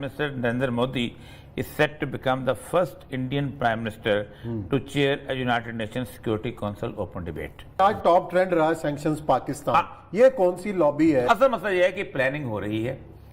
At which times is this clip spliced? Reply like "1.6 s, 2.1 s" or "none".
7.8 s, 11.2 s